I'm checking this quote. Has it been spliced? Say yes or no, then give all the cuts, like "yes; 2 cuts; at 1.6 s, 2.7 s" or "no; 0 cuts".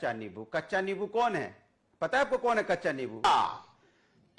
yes; 1 cut; at 3.2 s